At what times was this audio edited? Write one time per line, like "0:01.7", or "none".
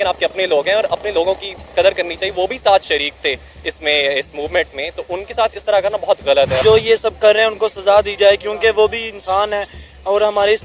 0:06.6